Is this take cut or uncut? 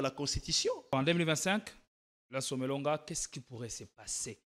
cut